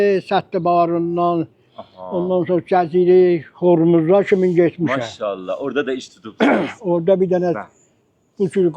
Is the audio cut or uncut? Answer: uncut